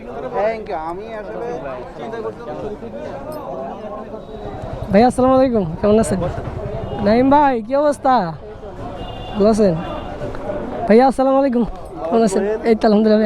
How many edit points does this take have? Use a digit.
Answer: 3